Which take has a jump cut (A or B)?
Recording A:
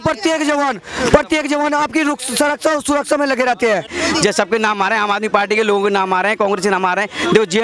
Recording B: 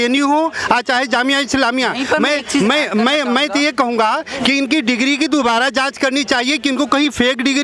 A